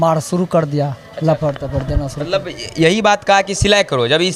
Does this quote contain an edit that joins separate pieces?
no; 0 cuts

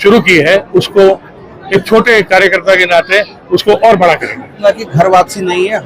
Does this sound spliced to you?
yes; 1 cut; at 4.6 s

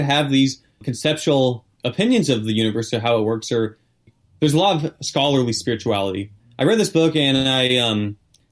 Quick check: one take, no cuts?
no; 4 cuts; at 0.9 s, 1.7 s, 4.1 s, 6.3 s

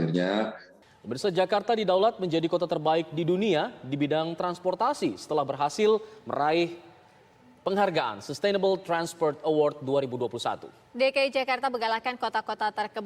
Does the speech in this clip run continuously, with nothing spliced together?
no; 1 cut; at 1.0 s

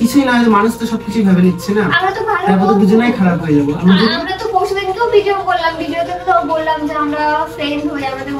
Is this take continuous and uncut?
yes; 0 cuts

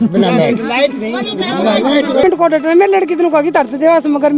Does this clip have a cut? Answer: yes; 1 cut; at 2.2 s

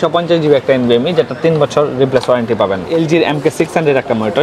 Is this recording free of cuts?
no; 1 cut; at 2.9 s

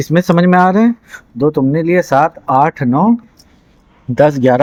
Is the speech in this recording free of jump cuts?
yes; 0 cuts

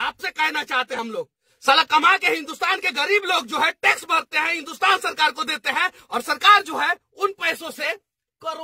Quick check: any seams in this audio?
yes; 1 cut; at 0.9 s

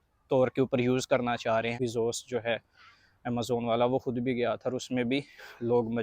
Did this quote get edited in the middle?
yes; 1 cut; at 1.8 s

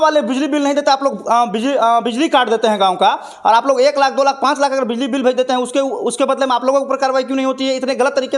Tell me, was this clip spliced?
no; 0 cuts

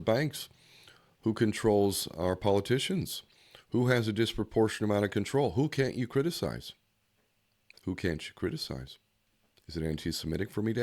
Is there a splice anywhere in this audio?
no; 0 cuts

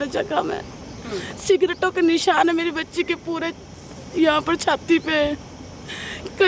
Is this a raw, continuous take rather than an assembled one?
yes; 0 cuts

